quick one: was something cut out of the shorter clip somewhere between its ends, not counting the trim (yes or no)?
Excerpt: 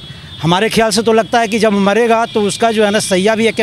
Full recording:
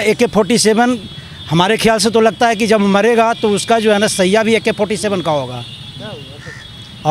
no